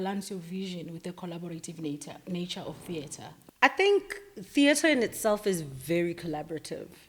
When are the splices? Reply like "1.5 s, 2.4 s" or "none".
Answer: none